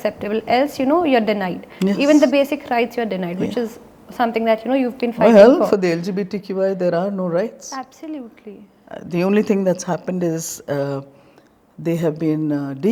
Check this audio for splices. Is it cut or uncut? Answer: uncut